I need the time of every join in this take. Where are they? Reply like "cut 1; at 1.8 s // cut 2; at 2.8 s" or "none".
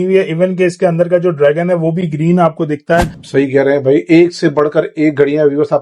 cut 1; at 3.2 s